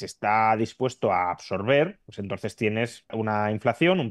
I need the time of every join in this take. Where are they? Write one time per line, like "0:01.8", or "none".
0:02.1
0:03.1

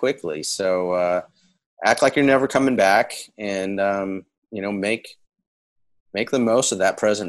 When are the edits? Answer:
none

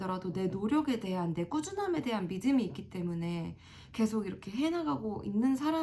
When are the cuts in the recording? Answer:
none

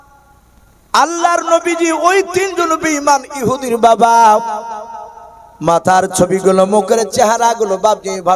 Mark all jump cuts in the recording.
none

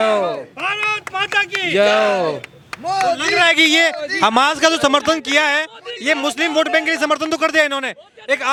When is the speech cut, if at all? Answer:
none

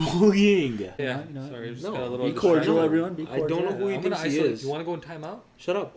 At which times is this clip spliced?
0:01.0

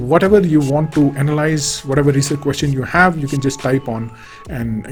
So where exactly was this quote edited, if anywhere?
none

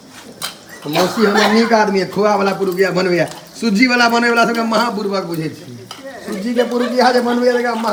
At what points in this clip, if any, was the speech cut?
none

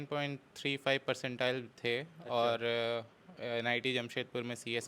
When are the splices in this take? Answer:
none

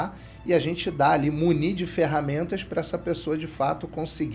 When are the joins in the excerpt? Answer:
none

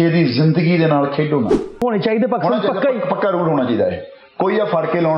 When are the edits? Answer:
0:01.8

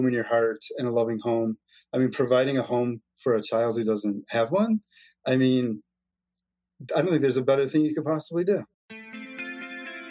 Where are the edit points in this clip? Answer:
0:08.8

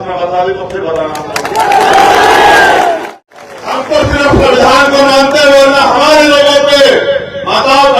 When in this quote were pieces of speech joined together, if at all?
none

